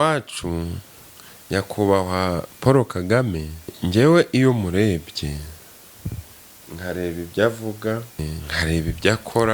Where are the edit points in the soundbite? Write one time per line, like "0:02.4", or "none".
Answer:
0:03.8
0:08.3

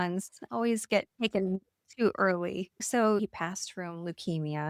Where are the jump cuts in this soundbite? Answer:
none

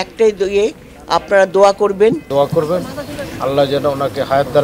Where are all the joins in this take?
0:02.2

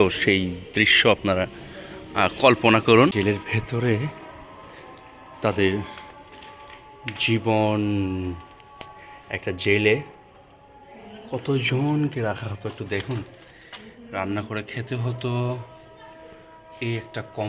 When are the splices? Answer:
0:03.1

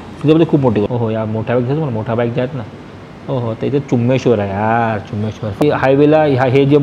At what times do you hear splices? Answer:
0:00.9
0:05.6

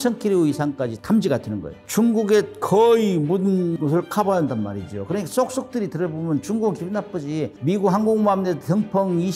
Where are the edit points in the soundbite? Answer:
0:01.0
0:01.8
0:03.7

